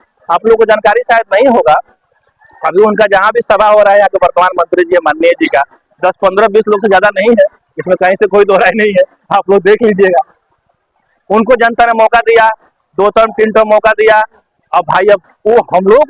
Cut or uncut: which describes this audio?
uncut